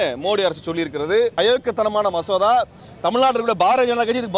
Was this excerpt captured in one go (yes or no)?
no